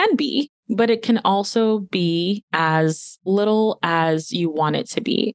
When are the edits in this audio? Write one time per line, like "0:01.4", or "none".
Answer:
none